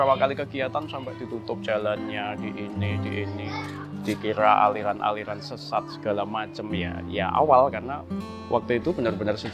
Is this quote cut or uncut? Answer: uncut